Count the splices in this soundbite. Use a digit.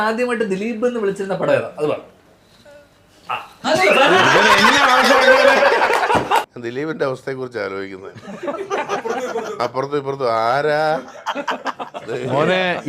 1